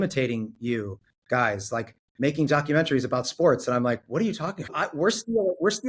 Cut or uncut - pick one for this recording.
cut